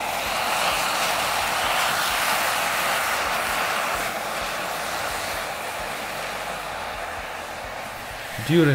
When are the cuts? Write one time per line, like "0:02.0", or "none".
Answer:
none

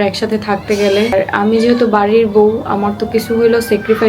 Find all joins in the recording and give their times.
0:01.1

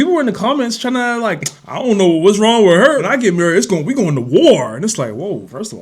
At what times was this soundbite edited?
0:03.1

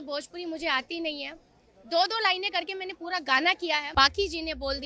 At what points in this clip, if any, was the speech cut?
0:03.9

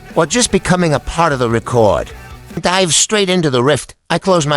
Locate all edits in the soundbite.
0:02.6

